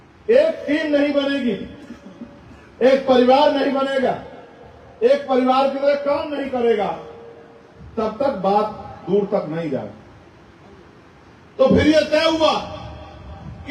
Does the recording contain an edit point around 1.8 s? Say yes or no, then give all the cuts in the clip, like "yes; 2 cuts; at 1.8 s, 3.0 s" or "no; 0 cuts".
no; 0 cuts